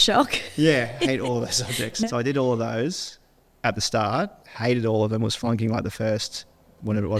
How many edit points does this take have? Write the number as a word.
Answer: one